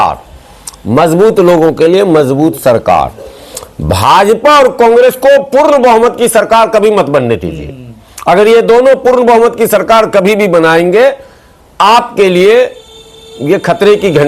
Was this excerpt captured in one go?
yes; 0 cuts

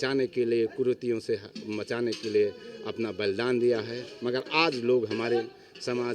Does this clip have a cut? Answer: no; 0 cuts

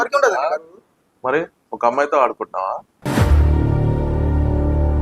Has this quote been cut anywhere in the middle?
no; 0 cuts

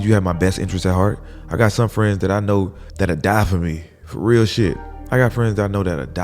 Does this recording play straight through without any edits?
no; 2 cuts; at 2.8 s, 4.9 s

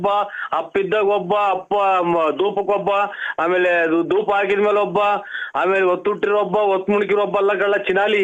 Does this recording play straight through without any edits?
yes; 0 cuts

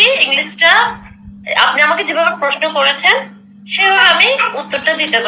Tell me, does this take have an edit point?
no; 0 cuts

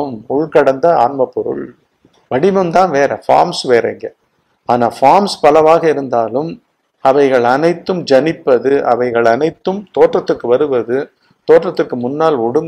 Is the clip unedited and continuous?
yes; 0 cuts

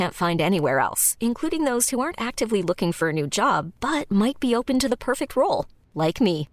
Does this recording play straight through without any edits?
yes; 0 cuts

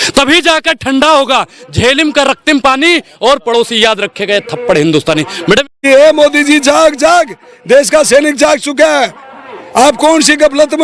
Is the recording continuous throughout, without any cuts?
no; 1 cut; at 5.8 s

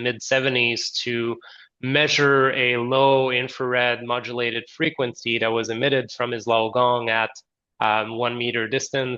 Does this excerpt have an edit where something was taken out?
no; 0 cuts

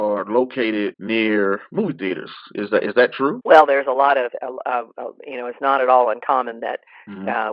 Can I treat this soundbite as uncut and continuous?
no; 2 cuts; at 1.0 s, 3.4 s

